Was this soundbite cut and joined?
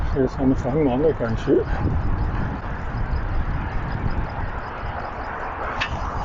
no; 0 cuts

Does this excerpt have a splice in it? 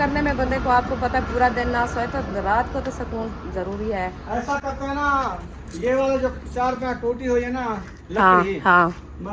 no; 0 cuts

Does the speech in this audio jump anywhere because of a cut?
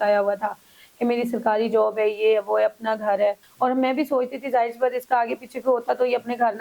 yes; 1 cut; at 3.5 s

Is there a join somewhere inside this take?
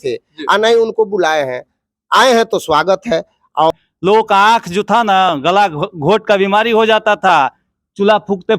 yes; 1 cut; at 3.7 s

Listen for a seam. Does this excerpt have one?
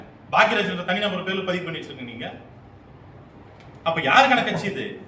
no; 0 cuts

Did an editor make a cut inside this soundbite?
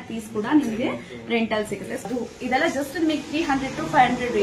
yes; 1 cut; at 2.1 s

